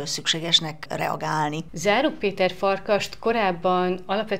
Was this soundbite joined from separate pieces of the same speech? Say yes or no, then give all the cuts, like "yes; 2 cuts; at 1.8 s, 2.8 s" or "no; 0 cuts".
no; 0 cuts